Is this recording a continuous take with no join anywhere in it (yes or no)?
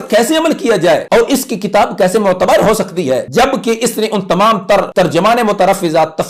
no